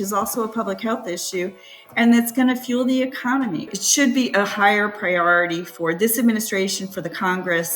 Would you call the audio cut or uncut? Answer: cut